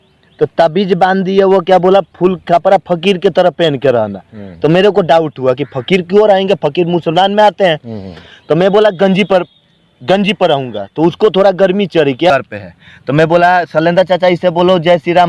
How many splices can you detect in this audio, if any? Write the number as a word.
one